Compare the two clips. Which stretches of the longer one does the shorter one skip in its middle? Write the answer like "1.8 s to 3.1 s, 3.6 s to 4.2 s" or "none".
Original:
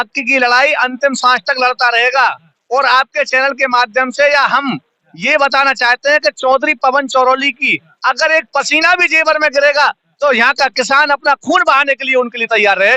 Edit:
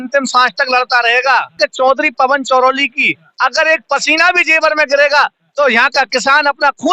2.5 s to 6.2 s

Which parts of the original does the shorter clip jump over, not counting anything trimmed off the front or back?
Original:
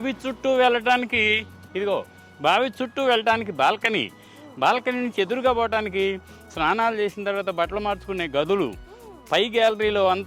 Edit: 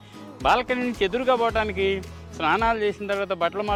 none

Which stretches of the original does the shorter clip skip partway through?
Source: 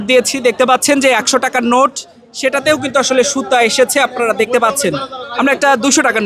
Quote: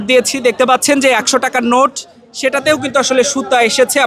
none

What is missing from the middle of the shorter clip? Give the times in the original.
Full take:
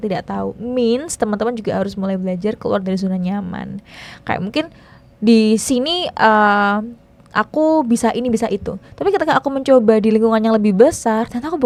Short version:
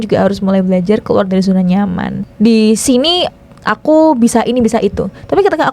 3.8 s to 5.0 s, 6.1 s to 7.0 s

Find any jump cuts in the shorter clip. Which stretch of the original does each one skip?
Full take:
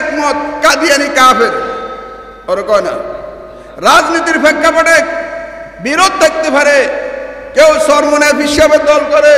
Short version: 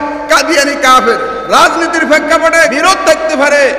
1.7 s to 3.7 s, 5.1 s to 5.9 s

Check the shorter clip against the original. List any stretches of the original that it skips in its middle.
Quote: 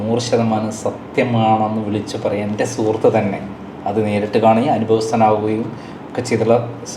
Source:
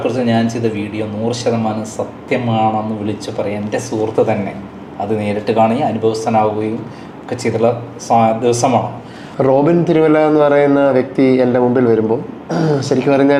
none

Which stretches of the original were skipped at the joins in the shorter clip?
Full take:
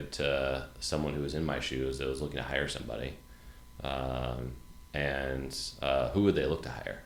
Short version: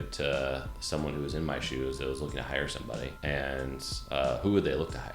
3.2 s to 4.9 s

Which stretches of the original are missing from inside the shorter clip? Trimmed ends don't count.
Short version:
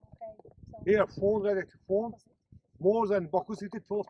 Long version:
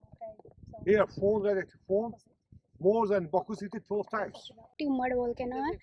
none

